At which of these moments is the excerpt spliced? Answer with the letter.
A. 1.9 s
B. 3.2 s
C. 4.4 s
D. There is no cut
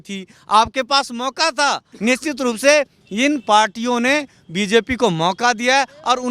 A